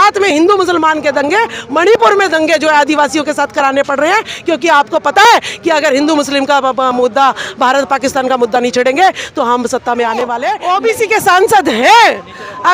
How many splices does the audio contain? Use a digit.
1